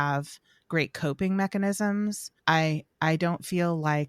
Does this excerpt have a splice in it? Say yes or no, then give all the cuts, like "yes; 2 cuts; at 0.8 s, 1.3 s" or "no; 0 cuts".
yes; 1 cut; at 2.3 s